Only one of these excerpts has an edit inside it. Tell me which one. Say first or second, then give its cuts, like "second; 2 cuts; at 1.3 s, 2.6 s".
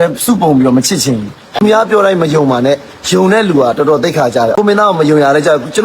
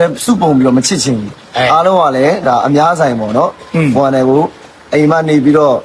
first; 2 cuts; at 1.4 s, 4.5 s